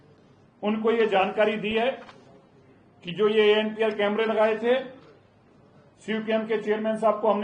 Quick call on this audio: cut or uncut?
uncut